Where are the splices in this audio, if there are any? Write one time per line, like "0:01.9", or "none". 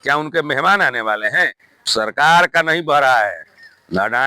0:01.7

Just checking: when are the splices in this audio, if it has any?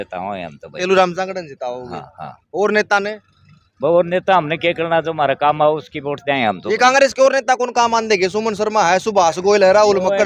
none

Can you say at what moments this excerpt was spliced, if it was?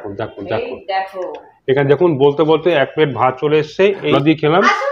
0:04.0

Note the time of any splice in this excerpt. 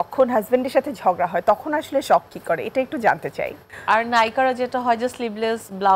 0:03.7

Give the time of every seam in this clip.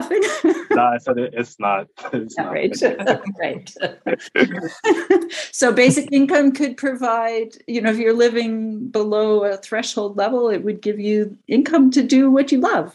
none

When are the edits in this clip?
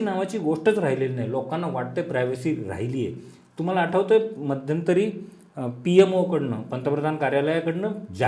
none

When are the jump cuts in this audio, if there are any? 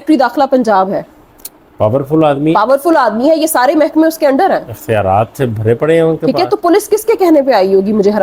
none

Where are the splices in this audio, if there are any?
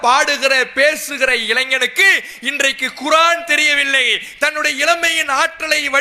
none

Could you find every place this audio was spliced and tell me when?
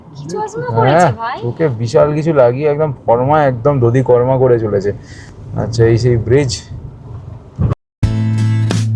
none

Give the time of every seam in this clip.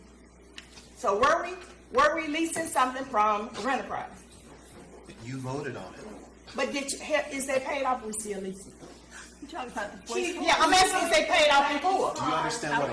none

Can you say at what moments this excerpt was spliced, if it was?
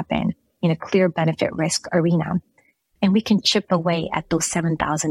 0:02.8

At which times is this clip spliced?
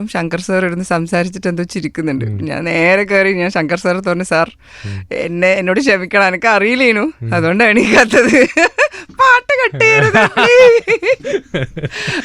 none

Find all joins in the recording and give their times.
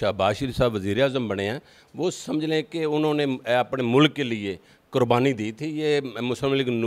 none

